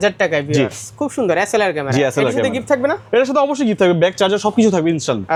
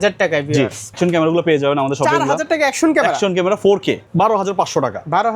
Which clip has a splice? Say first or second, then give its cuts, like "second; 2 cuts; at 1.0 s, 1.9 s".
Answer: second; 2 cuts; at 1.0 s, 4.0 s